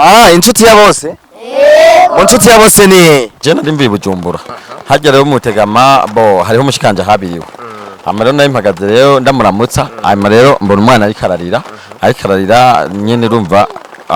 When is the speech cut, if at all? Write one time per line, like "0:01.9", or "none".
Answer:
0:03.4